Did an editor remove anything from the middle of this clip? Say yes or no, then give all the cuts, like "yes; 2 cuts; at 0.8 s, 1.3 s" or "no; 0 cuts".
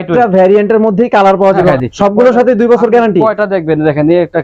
yes; 1 cut; at 1.6 s